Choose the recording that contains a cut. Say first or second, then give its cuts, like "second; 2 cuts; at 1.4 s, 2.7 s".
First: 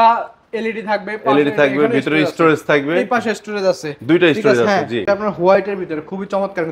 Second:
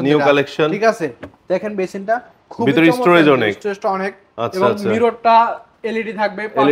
first; 1 cut; at 5.0 s